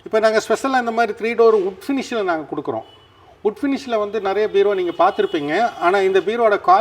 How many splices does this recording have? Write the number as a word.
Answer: zero